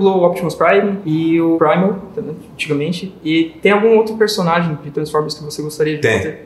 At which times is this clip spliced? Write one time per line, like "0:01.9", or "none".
0:01.1